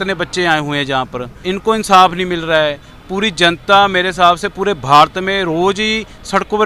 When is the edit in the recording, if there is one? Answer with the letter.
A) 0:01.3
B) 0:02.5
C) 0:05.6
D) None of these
A